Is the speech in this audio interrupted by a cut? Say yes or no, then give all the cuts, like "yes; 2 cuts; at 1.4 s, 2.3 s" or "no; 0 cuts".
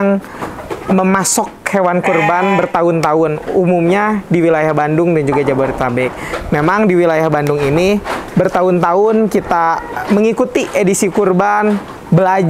no; 0 cuts